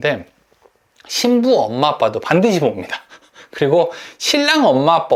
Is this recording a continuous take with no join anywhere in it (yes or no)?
yes